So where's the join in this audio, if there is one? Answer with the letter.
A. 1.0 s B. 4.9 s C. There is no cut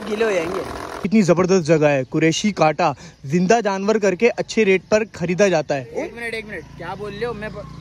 A